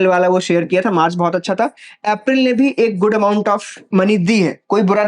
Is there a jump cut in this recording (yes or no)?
no